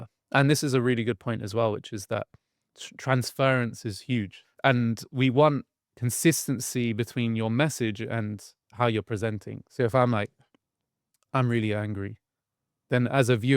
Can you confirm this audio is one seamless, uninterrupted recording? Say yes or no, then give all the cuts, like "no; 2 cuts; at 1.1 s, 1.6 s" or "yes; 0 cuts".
no; 1 cut; at 4.4 s